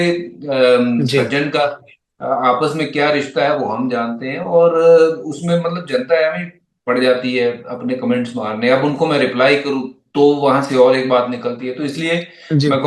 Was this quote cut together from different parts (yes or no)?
no